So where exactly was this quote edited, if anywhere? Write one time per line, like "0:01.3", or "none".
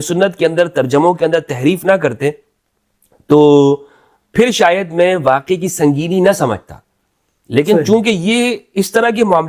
none